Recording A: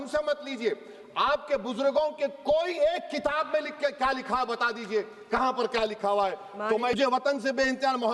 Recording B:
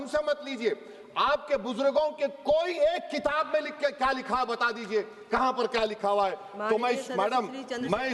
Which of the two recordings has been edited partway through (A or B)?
A